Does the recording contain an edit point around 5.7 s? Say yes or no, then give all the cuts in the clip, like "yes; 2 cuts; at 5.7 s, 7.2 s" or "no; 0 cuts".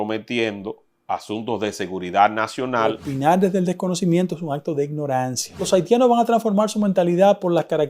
yes; 2 cuts; at 3.1 s, 5.7 s